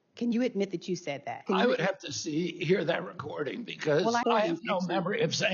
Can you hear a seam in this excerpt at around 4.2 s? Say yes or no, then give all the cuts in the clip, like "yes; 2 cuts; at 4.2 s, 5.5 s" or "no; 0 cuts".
yes; 2 cuts; at 1.4 s, 4.2 s